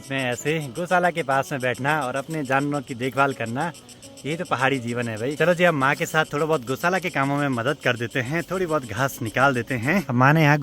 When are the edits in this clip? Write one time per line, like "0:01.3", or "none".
none